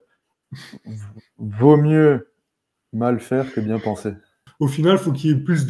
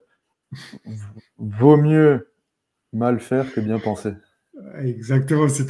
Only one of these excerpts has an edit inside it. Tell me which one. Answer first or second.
first